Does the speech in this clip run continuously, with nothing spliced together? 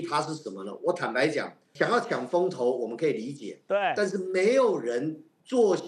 no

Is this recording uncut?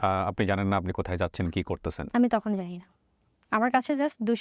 yes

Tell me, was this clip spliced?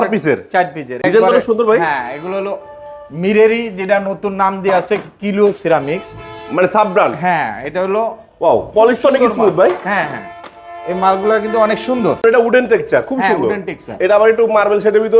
yes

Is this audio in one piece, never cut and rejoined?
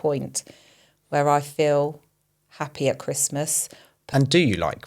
no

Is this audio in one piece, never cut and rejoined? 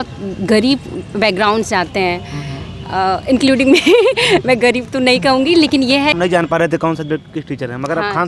no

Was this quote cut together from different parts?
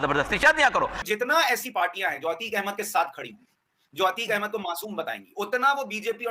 yes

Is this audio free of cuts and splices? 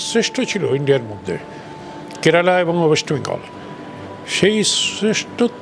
yes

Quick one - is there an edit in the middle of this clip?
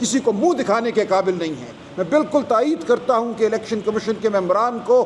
no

